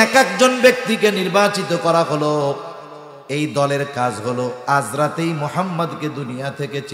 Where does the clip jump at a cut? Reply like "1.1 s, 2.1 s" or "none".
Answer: none

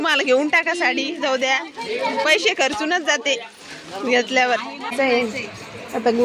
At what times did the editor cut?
4.9 s

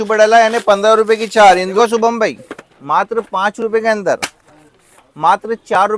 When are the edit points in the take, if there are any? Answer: 1.7 s

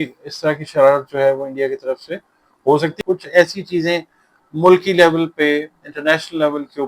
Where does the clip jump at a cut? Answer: 2.9 s

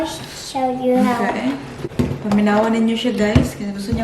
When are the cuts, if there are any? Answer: 1.8 s

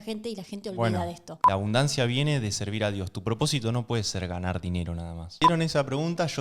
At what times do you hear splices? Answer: 1.3 s, 5.3 s

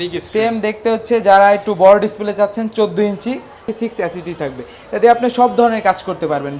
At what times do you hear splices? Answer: 3.7 s

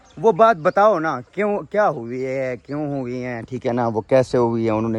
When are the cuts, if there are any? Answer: none

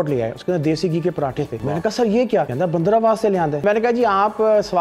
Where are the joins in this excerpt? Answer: 1.6 s, 2.5 s, 3.6 s

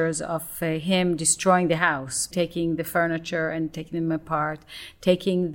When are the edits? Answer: 2.3 s

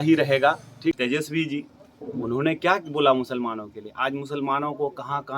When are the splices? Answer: 1.0 s

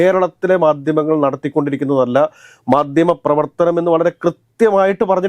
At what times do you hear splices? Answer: none

